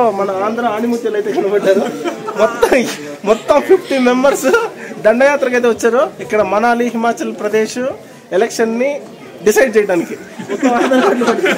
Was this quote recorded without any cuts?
yes; 0 cuts

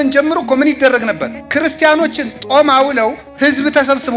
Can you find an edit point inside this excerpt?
yes; 2 cuts; at 1.3 s, 3.3 s

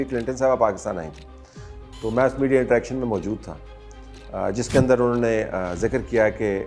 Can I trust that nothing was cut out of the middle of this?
yes; 0 cuts

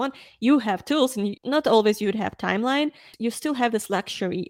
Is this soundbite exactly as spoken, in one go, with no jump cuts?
no; 2 cuts; at 1.4 s, 3.1 s

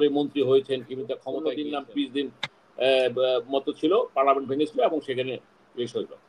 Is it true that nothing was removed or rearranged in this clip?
no; 1 cut; at 1.3 s

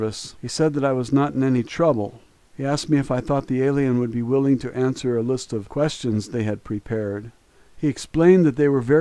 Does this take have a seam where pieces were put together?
no; 0 cuts

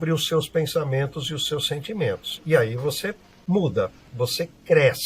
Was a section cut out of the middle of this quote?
yes; 1 cut; at 4.1 s

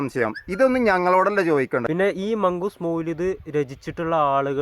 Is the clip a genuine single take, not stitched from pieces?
no; 1 cut; at 1.9 s

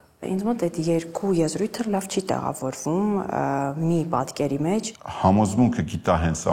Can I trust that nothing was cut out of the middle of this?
no; 1 cut; at 5.0 s

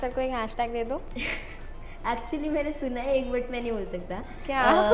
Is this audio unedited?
no; 1 cut; at 1.1 s

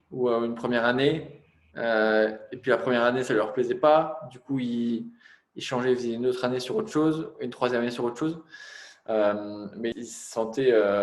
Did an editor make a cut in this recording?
yes; 1 cut; at 10.0 s

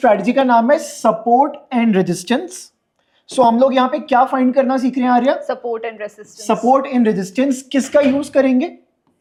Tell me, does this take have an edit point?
no; 0 cuts

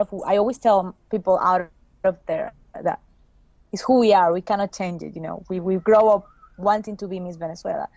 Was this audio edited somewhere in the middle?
no; 0 cuts

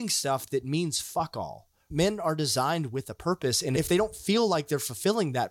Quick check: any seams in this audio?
yes; 2 cuts; at 1.9 s, 3.8 s

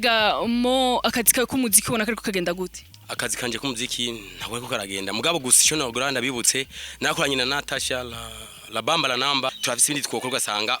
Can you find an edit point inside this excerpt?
yes; 1 cut; at 9.5 s

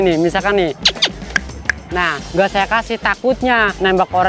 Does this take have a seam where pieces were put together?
yes; 1 cut; at 2.3 s

